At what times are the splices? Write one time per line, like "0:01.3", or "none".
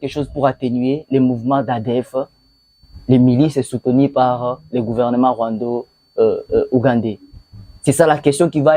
none

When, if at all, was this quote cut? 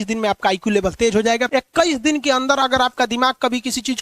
0:01.5

